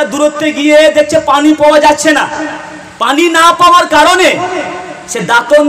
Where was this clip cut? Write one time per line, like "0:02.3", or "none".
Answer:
none